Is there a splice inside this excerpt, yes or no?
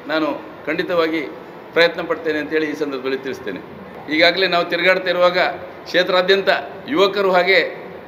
no